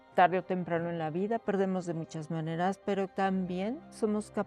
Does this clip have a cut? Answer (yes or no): yes